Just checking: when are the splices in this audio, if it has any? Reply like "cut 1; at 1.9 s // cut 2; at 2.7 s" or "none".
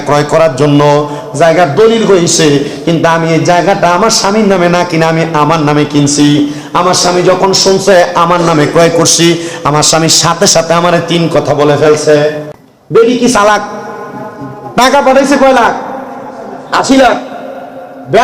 cut 1; at 13.0 s